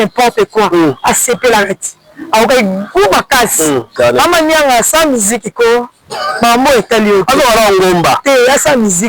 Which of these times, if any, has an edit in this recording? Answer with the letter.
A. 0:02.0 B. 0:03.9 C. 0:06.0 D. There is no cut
B